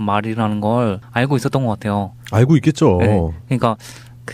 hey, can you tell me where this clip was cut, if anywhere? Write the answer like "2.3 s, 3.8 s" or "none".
2.0 s

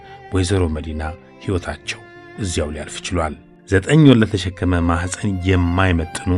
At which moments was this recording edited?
3.5 s

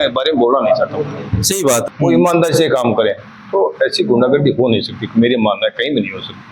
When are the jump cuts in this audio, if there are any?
1.8 s

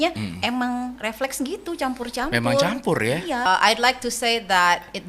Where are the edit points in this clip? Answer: 3.5 s

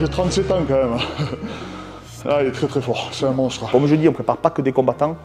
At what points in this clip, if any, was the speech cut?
3.6 s

